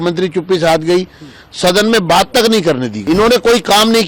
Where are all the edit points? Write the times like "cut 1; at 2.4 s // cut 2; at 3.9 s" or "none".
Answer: cut 1; at 2.9 s